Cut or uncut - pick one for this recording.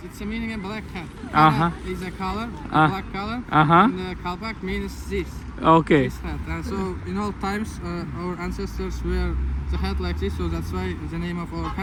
uncut